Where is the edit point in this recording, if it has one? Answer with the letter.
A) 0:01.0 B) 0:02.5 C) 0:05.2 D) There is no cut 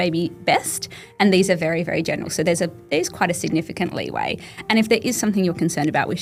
D